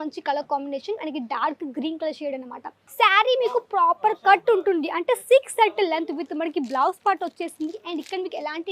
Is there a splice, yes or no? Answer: yes